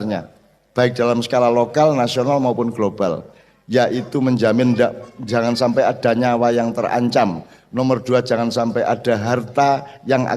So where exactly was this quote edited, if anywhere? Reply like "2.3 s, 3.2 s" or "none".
none